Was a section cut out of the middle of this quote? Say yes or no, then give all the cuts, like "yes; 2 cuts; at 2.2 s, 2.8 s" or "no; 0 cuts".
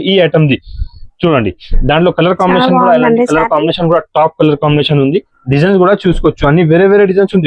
no; 0 cuts